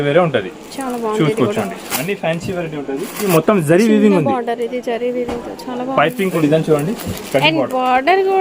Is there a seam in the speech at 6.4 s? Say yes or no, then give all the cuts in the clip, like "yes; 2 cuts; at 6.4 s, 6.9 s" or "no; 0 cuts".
yes; 2 cuts; at 3.3 s, 6.4 s